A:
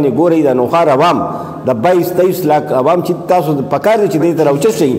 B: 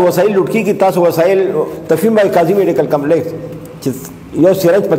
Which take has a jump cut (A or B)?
B